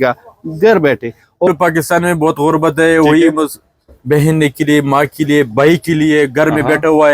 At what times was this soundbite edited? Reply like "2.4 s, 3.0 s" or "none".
1.5 s